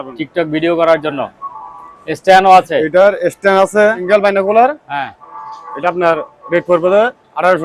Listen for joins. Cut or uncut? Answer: cut